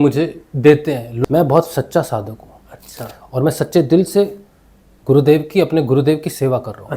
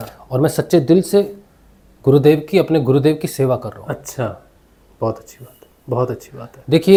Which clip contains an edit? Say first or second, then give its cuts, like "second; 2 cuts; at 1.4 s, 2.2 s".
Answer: first; 1 cut; at 1.1 s